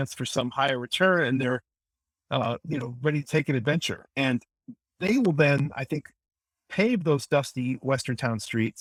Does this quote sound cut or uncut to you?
uncut